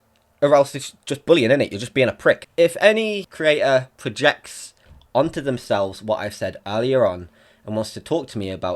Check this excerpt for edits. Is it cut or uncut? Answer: cut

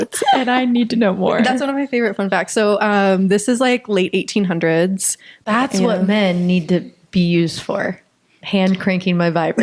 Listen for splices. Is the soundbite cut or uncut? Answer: cut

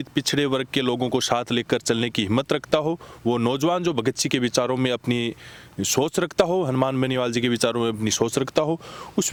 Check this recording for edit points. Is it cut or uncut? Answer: uncut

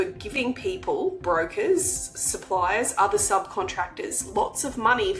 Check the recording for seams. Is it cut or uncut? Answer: uncut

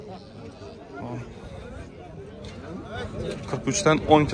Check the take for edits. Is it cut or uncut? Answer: uncut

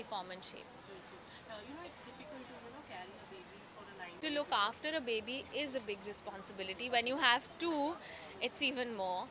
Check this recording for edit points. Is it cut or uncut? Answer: cut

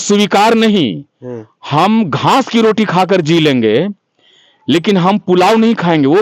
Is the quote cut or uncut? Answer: uncut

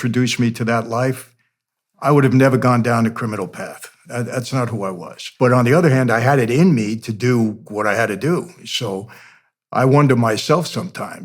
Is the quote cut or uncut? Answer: cut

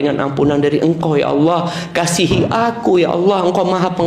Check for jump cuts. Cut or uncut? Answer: uncut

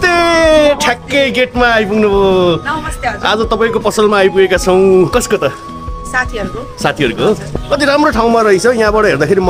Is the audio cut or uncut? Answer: cut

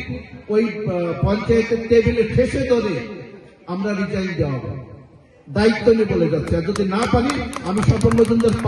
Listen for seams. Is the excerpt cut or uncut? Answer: uncut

